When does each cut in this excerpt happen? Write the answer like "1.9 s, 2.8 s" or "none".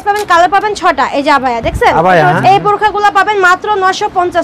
2.4 s

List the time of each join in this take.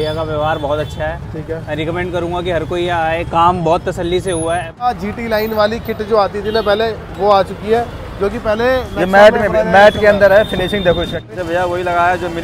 4.9 s, 11.3 s

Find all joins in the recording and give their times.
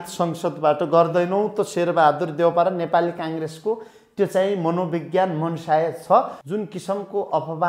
6.4 s

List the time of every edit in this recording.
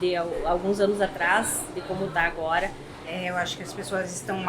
2.9 s

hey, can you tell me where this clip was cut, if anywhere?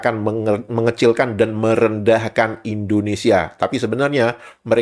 none

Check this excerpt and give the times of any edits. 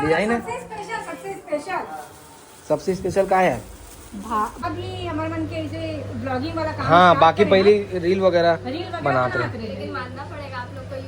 4.6 s

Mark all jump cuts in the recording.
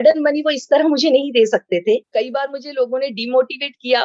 2.1 s

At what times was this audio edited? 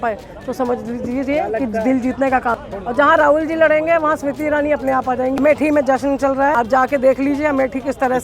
2.5 s, 5.4 s, 6.5 s

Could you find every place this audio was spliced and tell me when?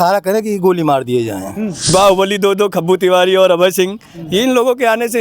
1.8 s

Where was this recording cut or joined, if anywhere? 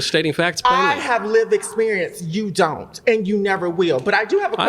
none

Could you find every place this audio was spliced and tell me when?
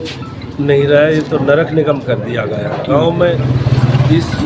3.5 s

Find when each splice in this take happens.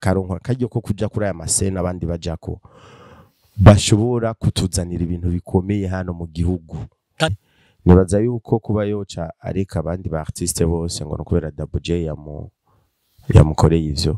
7.3 s

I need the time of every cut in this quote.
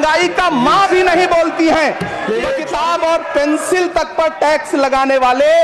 2.6 s

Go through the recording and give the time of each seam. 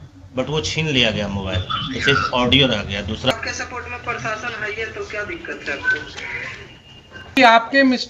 3.3 s, 7.4 s

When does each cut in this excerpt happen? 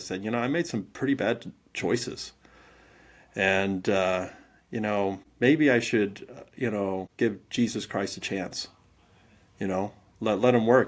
5.3 s, 7.1 s

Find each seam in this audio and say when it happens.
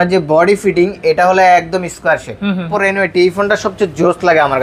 2.7 s

